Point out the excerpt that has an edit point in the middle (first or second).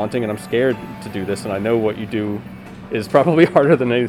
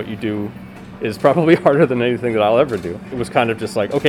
second